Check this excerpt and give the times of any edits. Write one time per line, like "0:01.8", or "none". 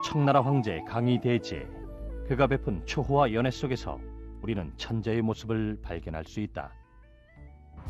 none